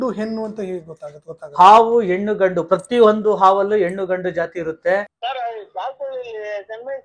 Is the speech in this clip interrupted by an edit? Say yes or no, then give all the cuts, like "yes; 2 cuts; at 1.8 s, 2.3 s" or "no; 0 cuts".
yes; 1 cut; at 5.1 s